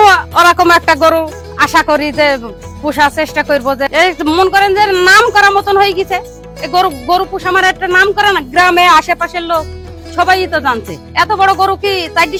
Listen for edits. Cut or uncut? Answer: uncut